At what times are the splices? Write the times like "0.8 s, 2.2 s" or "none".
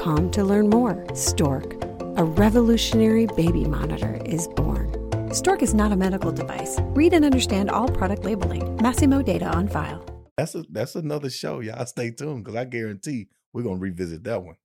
10.4 s